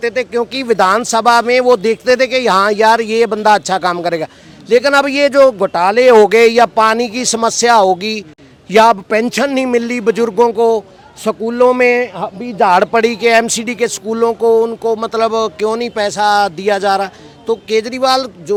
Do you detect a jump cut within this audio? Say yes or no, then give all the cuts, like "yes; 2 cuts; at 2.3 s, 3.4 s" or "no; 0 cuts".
no; 0 cuts